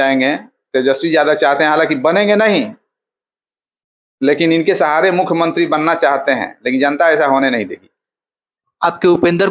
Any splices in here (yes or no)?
no